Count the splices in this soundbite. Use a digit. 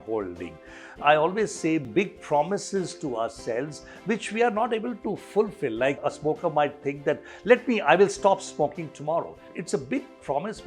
0